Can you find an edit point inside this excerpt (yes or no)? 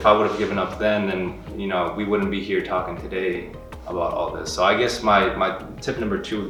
no